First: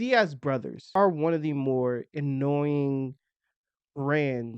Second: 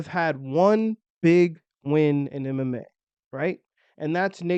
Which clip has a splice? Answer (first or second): first